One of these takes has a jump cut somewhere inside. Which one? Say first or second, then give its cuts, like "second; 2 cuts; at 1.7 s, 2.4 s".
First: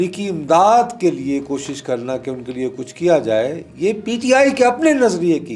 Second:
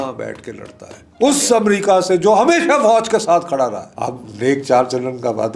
second; 2 cuts; at 1.0 s, 3.9 s